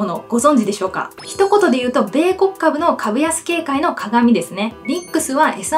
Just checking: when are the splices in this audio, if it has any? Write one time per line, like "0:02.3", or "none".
0:01.2
0:04.8